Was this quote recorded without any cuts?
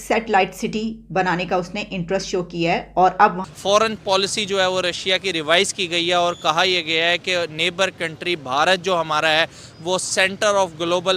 no; 1 cut; at 3.5 s

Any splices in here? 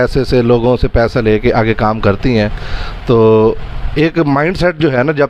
no; 0 cuts

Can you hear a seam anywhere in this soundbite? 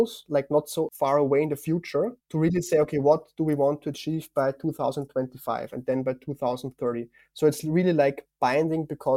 yes; 1 cut; at 0.9 s

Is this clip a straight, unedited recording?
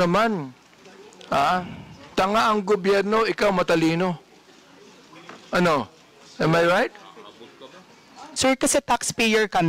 no; 1 cut; at 8.2 s

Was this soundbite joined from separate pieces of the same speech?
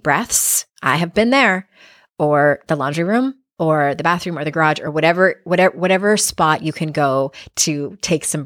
no; 0 cuts

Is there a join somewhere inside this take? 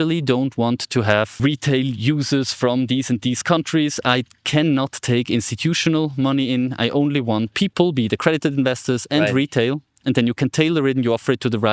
yes; 2 cuts; at 1.4 s, 7.5 s

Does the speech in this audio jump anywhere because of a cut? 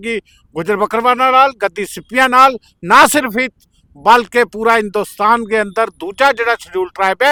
no; 0 cuts

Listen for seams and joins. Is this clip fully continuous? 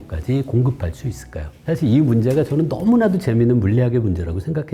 yes; 0 cuts

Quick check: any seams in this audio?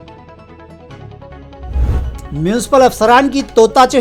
no; 0 cuts

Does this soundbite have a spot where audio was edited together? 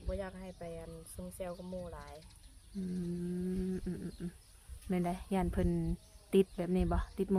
no; 0 cuts

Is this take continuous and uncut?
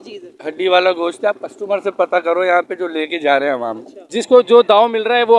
no; 1 cut; at 4.2 s

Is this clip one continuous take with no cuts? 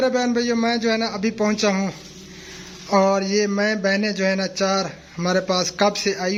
yes; 0 cuts

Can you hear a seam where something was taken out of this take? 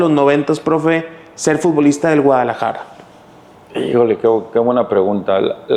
no; 0 cuts

